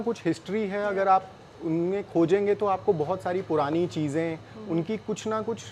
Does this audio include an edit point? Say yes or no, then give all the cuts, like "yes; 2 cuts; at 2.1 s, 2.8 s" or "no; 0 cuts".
no; 0 cuts